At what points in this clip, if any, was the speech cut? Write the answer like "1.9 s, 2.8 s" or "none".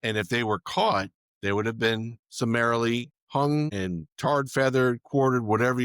1.2 s, 2.2 s, 3.2 s, 3.7 s